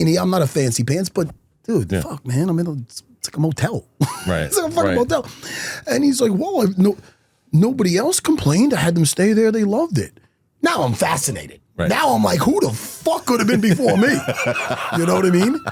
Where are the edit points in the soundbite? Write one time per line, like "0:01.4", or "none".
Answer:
none